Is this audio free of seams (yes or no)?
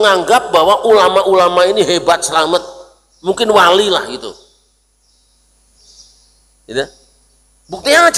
yes